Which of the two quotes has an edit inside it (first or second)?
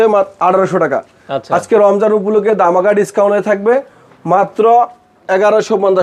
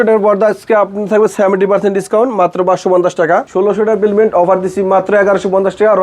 second